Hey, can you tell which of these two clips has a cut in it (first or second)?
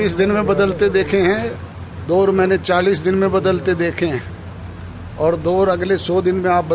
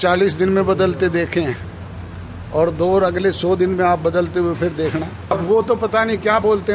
second